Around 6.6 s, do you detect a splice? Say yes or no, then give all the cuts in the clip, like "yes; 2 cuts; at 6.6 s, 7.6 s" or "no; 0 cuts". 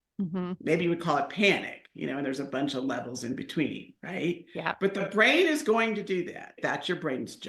yes; 1 cut; at 6.6 s